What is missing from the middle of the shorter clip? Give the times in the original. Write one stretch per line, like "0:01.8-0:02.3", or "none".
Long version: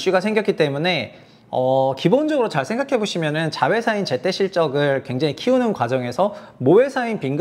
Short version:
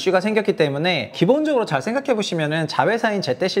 0:01.1-0:02.0